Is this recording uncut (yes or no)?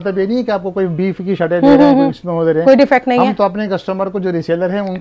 yes